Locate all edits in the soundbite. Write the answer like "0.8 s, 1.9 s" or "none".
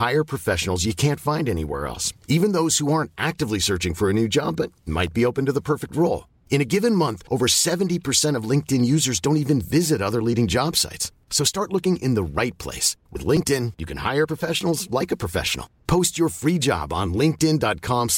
none